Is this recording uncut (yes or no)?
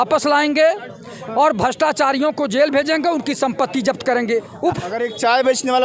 no